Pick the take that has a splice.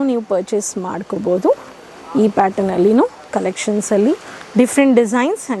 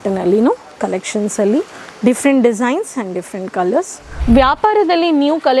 second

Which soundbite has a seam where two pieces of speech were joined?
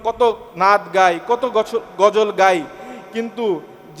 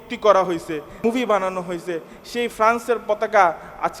second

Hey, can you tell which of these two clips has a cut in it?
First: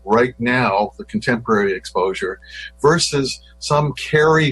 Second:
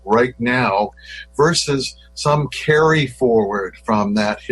second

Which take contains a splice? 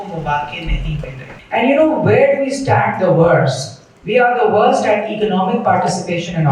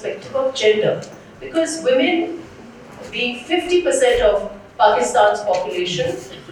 first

